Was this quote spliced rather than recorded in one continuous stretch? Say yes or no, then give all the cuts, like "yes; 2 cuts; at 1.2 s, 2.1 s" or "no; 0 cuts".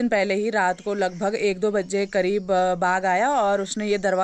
no; 0 cuts